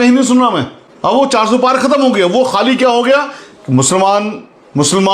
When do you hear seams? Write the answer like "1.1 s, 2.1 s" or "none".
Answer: none